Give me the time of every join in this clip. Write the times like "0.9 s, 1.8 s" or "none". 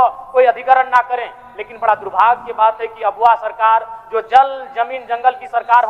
none